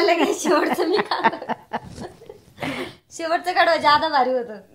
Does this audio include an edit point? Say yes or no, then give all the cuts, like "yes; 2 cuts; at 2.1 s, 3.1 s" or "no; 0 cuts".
yes; 1 cut; at 2.9 s